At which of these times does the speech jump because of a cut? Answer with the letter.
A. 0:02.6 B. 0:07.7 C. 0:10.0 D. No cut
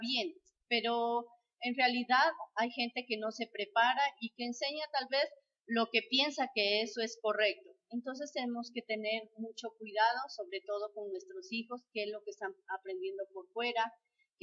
D